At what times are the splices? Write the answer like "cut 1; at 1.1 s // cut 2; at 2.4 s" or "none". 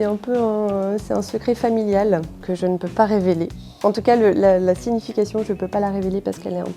cut 1; at 2.4 s